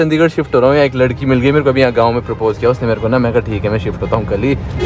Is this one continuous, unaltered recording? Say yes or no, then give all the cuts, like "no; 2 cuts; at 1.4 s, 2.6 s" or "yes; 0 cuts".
yes; 0 cuts